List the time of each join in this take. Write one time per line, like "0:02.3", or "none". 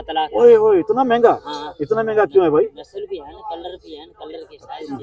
none